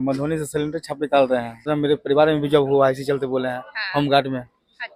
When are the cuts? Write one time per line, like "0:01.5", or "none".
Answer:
0:01.7